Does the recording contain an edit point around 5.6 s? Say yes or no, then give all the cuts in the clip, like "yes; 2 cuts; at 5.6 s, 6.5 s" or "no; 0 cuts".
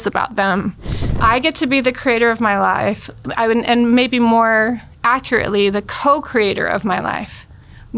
no; 1 cut; at 1.1 s